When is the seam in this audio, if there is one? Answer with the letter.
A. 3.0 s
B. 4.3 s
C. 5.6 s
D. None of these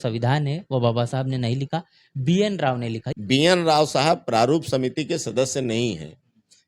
A